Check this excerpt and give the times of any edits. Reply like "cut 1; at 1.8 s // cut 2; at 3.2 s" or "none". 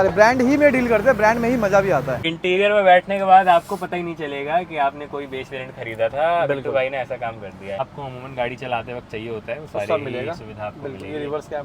cut 1; at 2.2 s // cut 2; at 7.8 s